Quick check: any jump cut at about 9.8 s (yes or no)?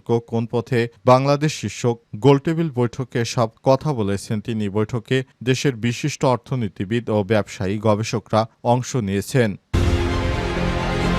yes